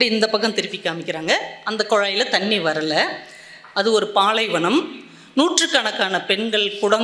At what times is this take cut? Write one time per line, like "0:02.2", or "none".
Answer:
none